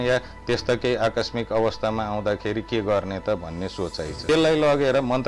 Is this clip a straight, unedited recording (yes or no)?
no